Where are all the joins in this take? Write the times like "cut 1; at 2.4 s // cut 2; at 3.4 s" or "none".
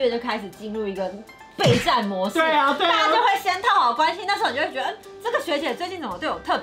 none

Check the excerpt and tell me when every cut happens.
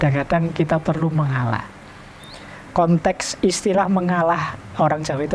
none

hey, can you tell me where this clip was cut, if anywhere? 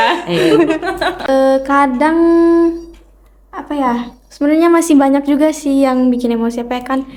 cut 1; at 1.2 s

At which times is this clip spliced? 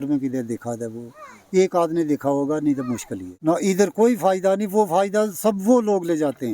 cut 1; at 3.3 s

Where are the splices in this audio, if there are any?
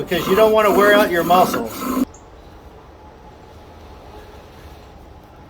cut 1; at 2.0 s

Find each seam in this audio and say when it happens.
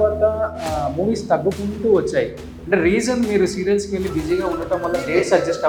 none

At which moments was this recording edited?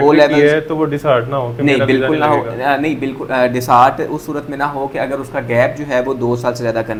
none

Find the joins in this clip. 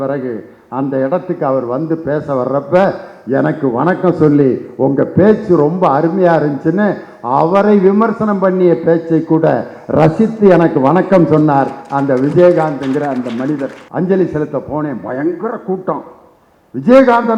cut 1; at 13.8 s

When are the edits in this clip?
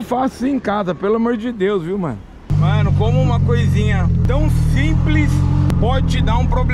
cut 1; at 2.5 s // cut 2; at 4.2 s // cut 3; at 5.7 s

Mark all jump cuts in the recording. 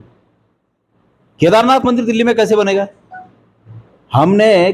none

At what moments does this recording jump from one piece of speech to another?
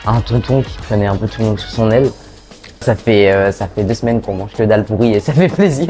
cut 1; at 2.8 s

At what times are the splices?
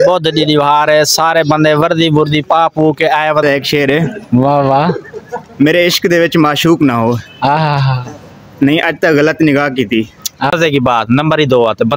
cut 1; at 3.4 s // cut 2; at 10.5 s

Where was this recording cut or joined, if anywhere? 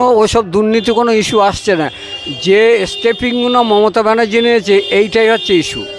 none

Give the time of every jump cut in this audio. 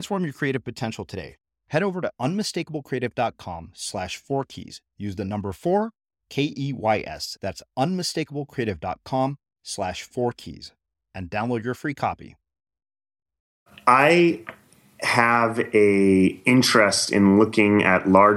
cut 1; at 13.7 s

